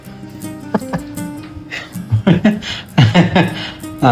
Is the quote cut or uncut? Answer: uncut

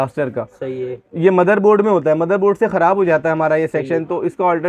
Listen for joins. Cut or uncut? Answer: uncut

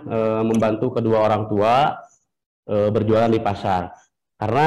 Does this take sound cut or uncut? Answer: uncut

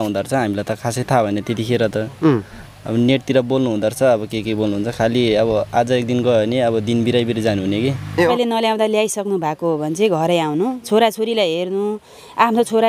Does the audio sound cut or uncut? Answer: cut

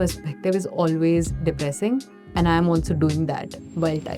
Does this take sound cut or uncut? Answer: uncut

